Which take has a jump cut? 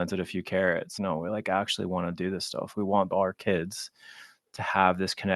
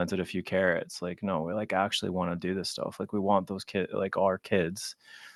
first; 2 cuts; at 0.9 s, 2.8 s

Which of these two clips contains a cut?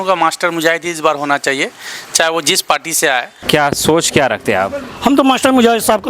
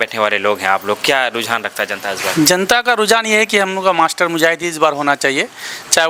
first; 1 cut; at 3.4 s

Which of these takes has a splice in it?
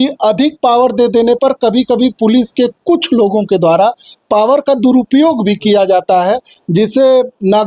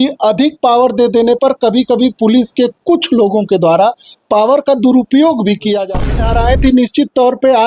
second; 1 cut; at 6.1 s

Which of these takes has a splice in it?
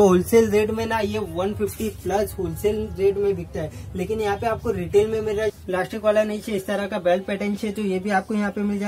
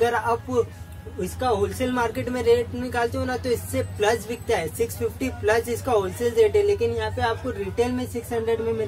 first; 1 cut; at 5.5 s

